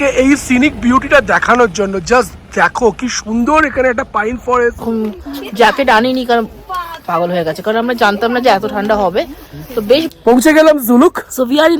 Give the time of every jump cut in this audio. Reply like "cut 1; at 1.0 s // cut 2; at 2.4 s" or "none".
cut 1; at 4.8 s // cut 2; at 10.1 s